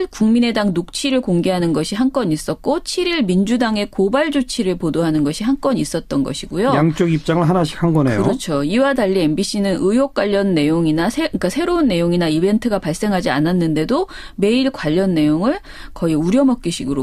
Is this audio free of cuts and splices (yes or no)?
no